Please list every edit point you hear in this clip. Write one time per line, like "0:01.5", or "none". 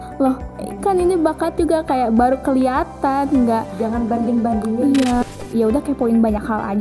0:05.2